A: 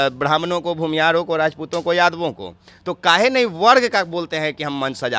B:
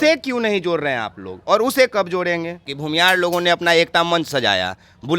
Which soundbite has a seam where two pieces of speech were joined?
B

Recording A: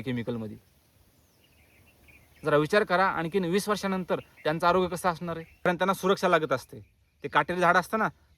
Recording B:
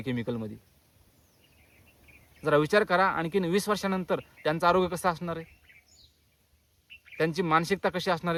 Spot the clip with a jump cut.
A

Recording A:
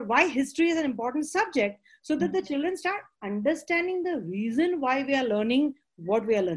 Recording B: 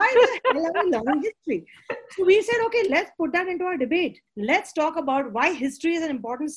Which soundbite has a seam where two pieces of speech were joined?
B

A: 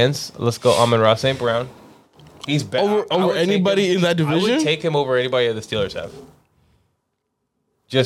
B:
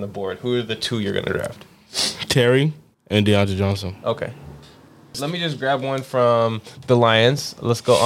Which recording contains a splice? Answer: B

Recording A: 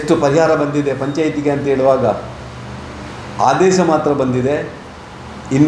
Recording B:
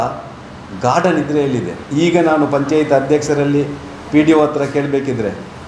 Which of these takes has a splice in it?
B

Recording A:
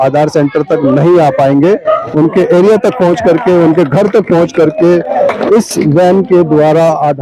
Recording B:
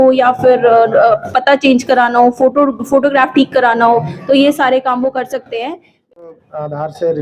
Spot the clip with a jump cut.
B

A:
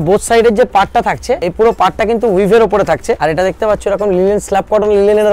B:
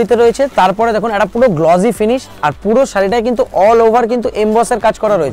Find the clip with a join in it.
A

